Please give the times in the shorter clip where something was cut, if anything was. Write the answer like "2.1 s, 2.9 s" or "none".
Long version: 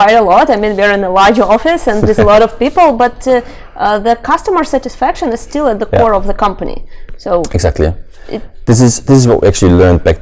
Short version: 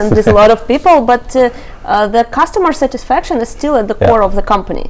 none